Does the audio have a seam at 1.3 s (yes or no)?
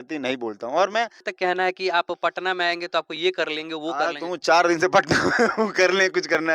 yes